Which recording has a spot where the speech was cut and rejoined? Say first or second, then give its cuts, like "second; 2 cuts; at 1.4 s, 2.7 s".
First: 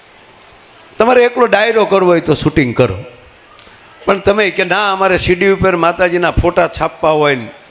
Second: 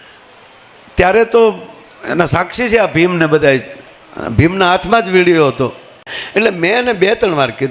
second; 1 cut; at 6.1 s